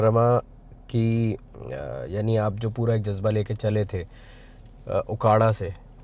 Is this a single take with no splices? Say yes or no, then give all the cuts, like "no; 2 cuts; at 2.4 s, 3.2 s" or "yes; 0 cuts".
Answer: yes; 0 cuts